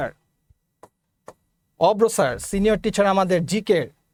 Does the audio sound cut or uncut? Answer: uncut